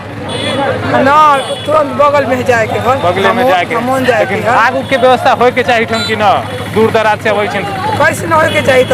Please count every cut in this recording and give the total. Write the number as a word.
zero